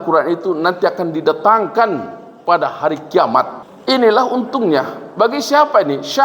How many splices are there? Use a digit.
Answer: 1